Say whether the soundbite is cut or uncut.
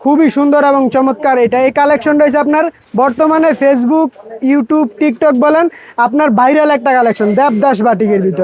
uncut